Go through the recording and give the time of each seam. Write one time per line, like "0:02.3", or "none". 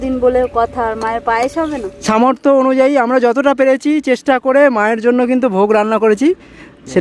0:01.9